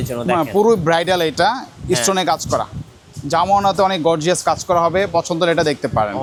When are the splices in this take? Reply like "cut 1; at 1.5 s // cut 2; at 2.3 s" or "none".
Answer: none